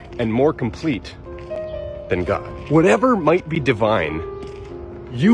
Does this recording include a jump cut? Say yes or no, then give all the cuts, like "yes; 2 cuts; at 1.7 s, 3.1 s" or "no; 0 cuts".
no; 0 cuts